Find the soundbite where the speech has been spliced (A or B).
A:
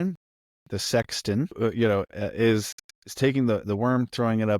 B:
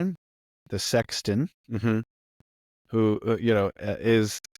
A